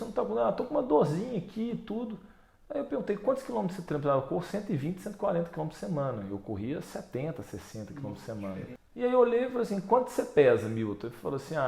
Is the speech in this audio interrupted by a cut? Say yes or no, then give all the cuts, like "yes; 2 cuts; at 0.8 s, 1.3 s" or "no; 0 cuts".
yes; 1 cut; at 8.8 s